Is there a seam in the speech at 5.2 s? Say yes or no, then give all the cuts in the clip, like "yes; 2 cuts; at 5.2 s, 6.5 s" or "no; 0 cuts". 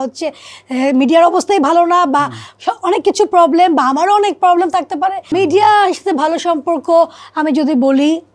yes; 1 cut; at 5.2 s